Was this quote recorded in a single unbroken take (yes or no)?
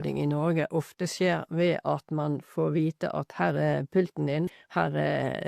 no